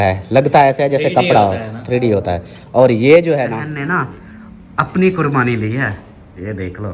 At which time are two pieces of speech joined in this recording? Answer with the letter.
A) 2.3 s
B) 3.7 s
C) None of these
B